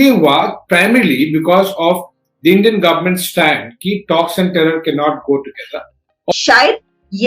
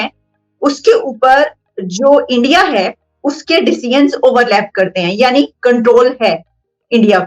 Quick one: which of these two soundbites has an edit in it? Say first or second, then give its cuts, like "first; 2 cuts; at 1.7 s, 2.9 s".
first; 1 cut; at 6.3 s